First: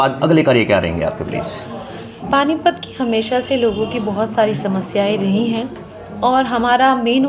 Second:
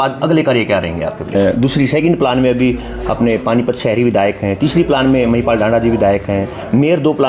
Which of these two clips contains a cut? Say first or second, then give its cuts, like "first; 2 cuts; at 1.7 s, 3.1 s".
second; 1 cut; at 1.3 s